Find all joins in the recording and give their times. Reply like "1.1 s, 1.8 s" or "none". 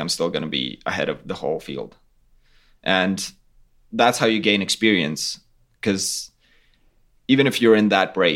none